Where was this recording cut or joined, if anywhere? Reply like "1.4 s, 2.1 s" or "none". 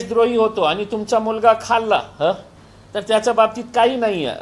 none